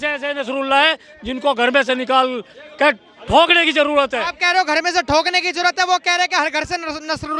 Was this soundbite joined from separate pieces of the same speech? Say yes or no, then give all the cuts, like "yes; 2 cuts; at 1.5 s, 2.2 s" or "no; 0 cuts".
no; 0 cuts